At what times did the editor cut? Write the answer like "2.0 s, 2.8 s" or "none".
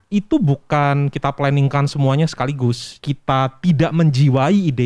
3.0 s